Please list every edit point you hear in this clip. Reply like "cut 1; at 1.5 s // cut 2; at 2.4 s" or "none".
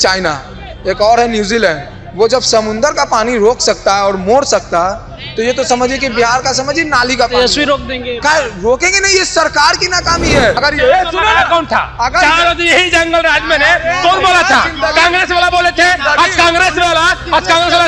cut 1; at 10.6 s